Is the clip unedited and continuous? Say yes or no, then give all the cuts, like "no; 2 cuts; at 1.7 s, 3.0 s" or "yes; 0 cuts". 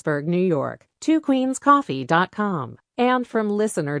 yes; 0 cuts